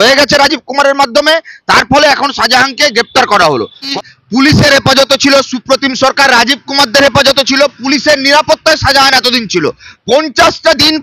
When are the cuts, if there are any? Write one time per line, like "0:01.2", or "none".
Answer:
0:03.9

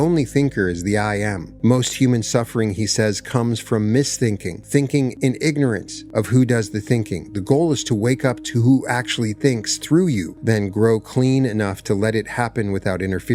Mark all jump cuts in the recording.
0:01.4
0:04.6
0:05.1
0:05.9
0:10.3

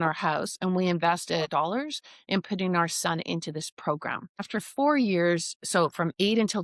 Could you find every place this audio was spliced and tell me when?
0:01.5
0:04.5

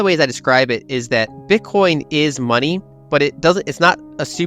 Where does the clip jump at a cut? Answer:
0:01.3
0:02.9

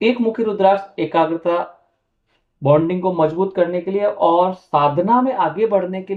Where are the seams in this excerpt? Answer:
none

